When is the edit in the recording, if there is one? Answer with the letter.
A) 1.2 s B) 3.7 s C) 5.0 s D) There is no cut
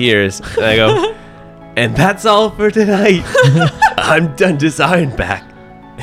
D